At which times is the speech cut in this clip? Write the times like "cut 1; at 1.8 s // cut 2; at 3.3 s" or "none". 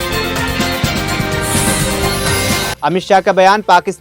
none